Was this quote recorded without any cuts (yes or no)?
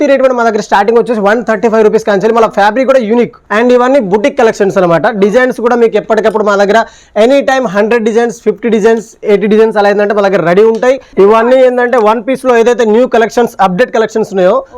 no